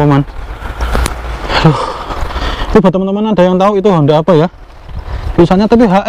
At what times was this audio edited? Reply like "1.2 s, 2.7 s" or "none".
none

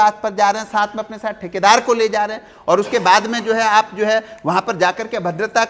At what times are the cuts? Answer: none

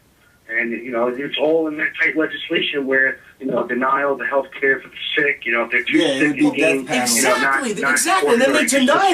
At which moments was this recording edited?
2.2 s

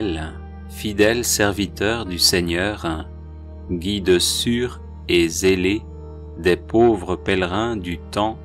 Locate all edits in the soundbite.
none

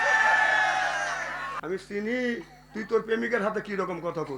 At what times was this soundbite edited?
1.5 s

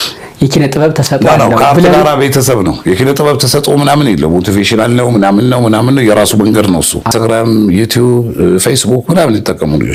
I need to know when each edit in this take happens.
none

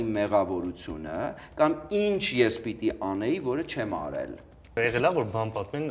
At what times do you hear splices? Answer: 4.7 s

